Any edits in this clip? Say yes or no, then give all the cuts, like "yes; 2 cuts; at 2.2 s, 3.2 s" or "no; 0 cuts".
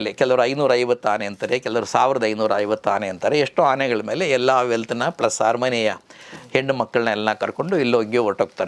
no; 0 cuts